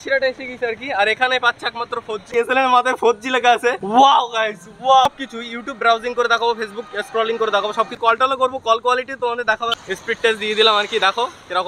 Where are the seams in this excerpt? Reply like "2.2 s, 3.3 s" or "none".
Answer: 2.3 s, 3.8 s, 5.1 s, 7.9 s, 9.9 s